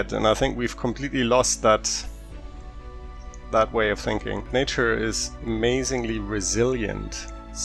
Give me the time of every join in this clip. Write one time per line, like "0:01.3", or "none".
0:04.5